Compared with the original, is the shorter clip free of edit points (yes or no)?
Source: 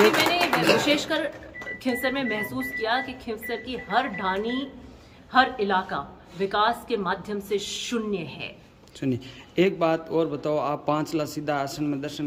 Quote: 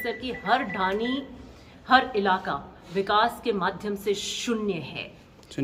yes